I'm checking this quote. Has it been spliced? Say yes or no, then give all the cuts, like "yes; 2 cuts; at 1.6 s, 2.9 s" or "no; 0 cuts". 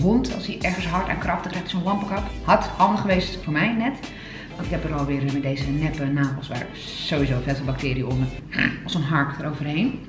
no; 0 cuts